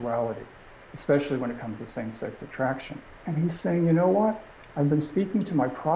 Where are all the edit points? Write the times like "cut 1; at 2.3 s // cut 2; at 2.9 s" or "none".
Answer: cut 1; at 3.2 s